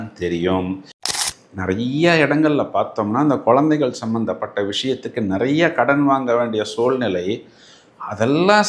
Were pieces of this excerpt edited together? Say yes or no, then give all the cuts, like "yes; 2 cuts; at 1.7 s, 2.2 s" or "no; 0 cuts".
yes; 1 cut; at 1.0 s